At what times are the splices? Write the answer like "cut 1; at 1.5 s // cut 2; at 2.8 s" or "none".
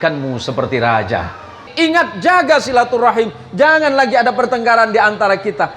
cut 1; at 1.7 s